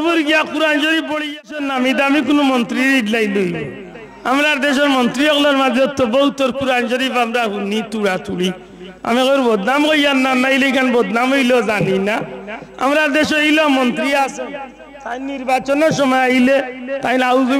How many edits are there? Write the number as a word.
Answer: one